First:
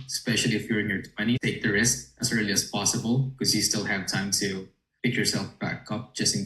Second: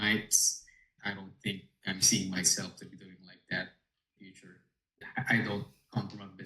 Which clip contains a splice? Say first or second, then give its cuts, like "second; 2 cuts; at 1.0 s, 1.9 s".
second; 2 cuts; at 0.9 s, 5.0 s